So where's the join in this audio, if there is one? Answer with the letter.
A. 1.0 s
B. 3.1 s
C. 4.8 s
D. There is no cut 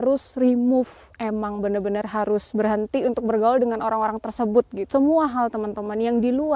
C